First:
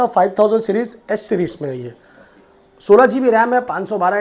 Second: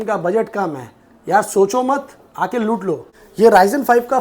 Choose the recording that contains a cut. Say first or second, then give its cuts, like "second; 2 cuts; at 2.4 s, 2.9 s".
second; 1 cut; at 3.2 s